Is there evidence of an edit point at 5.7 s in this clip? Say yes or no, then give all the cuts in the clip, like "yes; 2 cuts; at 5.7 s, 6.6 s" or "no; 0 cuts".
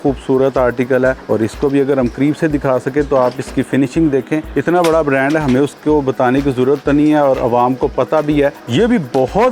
no; 3 cuts; at 1.2 s, 4.5 s, 8.6 s